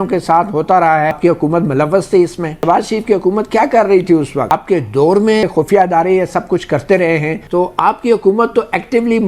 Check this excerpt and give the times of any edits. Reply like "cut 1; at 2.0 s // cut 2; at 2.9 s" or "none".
cut 1; at 1.2 s // cut 2; at 2.6 s // cut 3; at 4.5 s // cut 4; at 5.4 s // cut 5; at 7.4 s